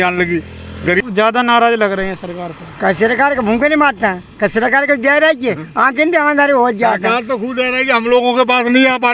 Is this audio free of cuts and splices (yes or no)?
no